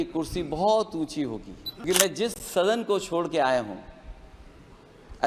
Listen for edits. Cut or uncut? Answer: cut